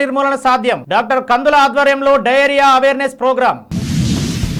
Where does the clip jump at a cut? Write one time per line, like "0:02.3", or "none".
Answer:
none